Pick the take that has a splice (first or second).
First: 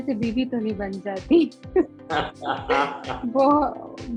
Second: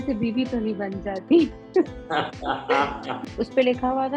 second